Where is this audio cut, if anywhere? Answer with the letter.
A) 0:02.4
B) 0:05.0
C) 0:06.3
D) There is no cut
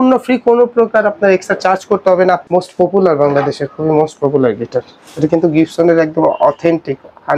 A